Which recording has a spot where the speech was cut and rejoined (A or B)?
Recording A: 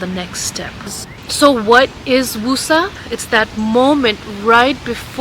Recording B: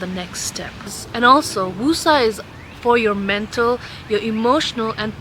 A